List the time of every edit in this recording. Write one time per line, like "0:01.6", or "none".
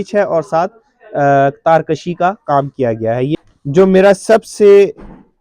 0:03.4